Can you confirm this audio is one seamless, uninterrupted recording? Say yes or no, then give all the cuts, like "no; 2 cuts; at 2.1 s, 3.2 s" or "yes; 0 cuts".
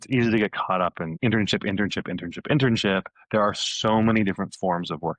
no; 1 cut; at 1.1 s